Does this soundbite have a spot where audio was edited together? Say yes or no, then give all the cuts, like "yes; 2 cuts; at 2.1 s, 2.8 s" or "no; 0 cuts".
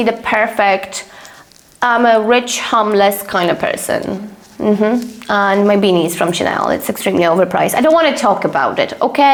no; 0 cuts